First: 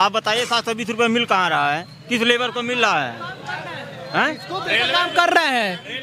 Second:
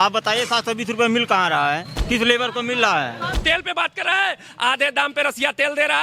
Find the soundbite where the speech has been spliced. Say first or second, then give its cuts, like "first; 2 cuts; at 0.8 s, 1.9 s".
second; 1 cut; at 3.4 s